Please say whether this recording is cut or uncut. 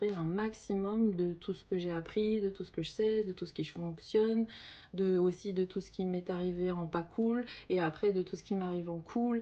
uncut